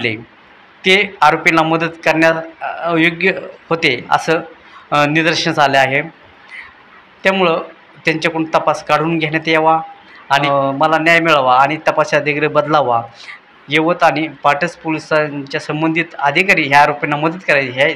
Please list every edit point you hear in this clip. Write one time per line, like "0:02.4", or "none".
0:10.4